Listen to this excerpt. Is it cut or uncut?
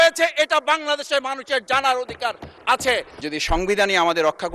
cut